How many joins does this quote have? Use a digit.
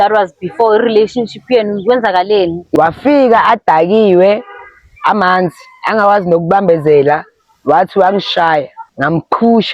2